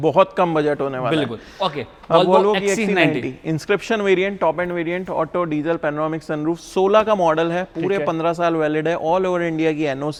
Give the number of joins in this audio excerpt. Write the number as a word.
zero